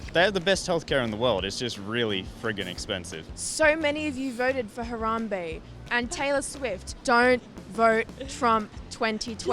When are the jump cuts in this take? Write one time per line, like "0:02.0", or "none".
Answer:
0:03.3
0:06.9